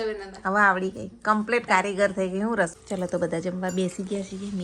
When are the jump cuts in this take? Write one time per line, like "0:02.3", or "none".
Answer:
0:02.7